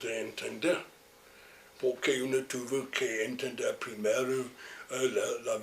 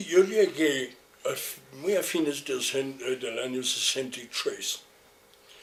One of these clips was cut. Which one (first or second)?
first